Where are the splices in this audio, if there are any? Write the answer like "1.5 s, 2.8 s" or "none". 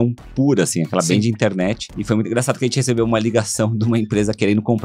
1.9 s